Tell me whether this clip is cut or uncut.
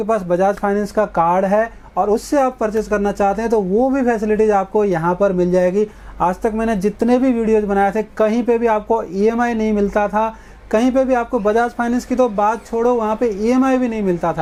uncut